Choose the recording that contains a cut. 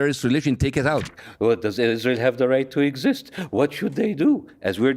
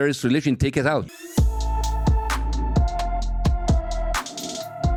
first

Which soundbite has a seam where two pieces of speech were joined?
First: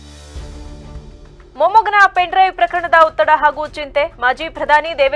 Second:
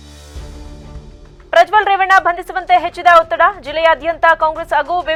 first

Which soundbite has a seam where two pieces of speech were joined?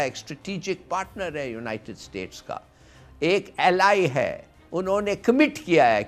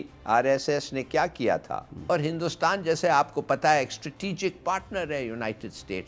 second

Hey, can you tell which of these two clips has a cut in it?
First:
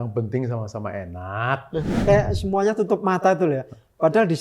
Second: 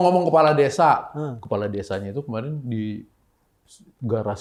first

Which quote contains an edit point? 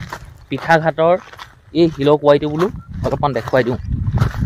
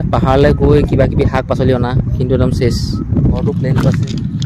second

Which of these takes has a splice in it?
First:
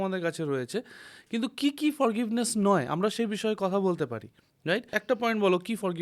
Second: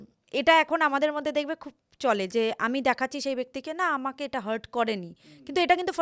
first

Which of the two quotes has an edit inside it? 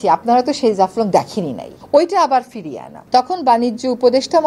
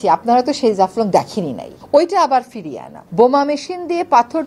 second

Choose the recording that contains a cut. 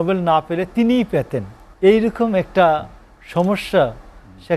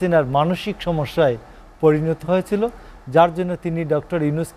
first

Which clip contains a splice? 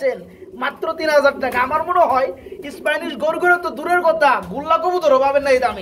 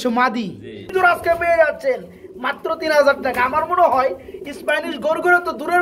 second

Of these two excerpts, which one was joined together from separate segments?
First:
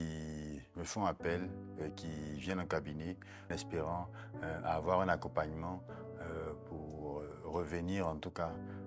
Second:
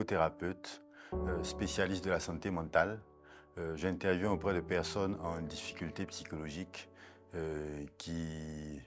first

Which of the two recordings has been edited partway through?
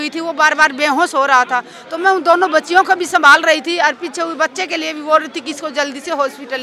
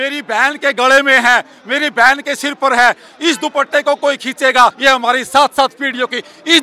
second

